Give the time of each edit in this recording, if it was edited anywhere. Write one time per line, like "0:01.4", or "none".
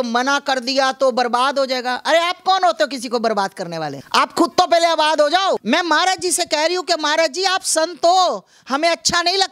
0:04.0
0:05.6